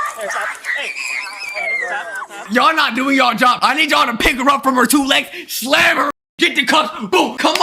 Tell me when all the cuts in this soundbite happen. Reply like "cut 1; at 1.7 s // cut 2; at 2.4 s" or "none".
cut 1; at 2.4 s // cut 2; at 6.1 s

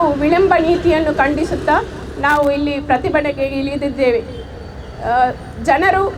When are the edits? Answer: none

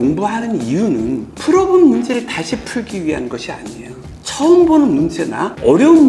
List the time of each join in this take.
none

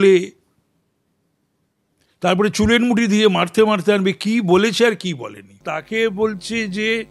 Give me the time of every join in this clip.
cut 1; at 5.7 s

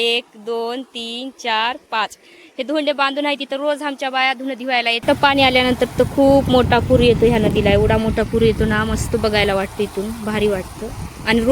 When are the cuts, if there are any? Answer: cut 1; at 5.0 s

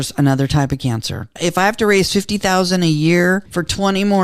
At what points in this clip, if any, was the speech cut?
cut 1; at 1.3 s // cut 2; at 3.4 s

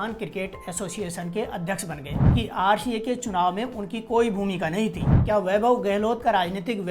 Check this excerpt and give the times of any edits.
cut 1; at 2.3 s // cut 2; at 5.1 s

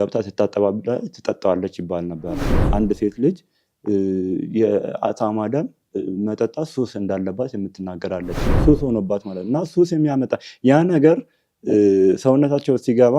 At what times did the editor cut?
cut 1; at 2.5 s // cut 2; at 8.4 s

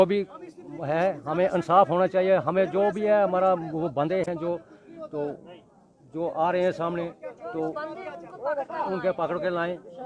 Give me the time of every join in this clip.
none

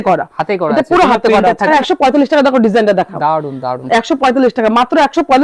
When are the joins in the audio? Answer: cut 1; at 1.7 s

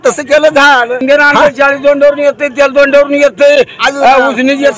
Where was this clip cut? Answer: cut 1; at 1.0 s

